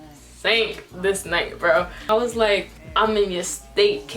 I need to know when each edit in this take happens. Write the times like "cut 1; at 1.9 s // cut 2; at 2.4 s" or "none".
cut 1; at 2.0 s